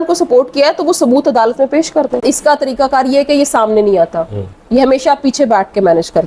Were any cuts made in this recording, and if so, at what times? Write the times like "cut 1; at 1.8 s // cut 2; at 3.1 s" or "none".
cut 1; at 2.1 s